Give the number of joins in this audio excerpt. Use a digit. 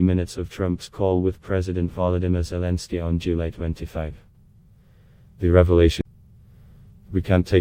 1